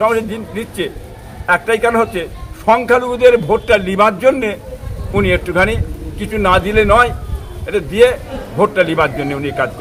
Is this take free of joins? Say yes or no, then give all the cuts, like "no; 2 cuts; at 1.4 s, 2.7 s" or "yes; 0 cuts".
yes; 0 cuts